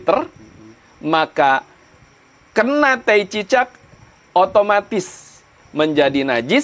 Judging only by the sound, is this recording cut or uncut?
uncut